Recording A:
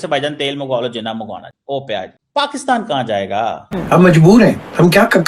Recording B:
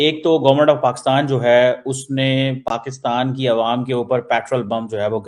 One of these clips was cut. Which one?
A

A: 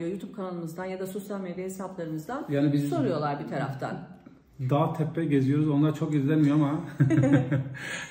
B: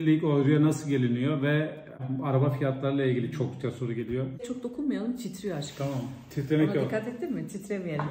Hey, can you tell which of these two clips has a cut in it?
B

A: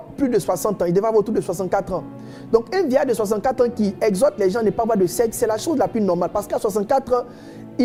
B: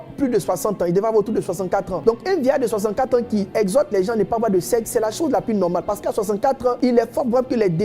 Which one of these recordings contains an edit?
B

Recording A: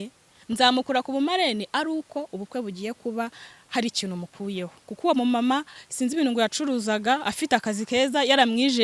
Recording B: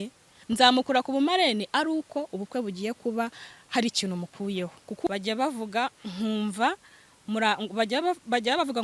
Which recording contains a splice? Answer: B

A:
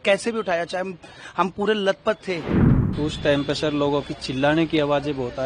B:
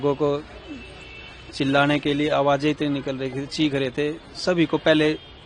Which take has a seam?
A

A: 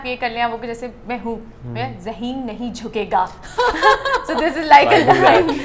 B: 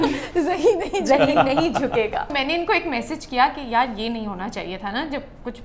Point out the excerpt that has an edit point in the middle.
B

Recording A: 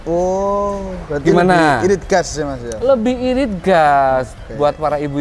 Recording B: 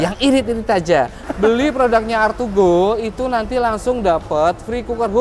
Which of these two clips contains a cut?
B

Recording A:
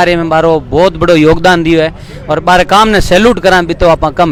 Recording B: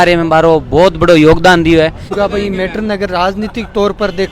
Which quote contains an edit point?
B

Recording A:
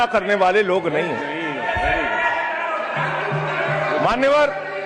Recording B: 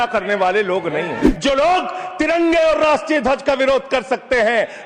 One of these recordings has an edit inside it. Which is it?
B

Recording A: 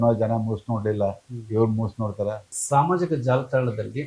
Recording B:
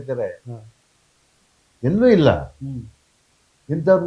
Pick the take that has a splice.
A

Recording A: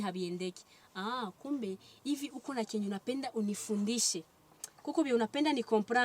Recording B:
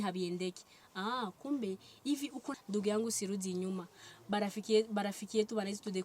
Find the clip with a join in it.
B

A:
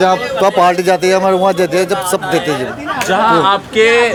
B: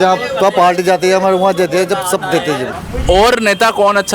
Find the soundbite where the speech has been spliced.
B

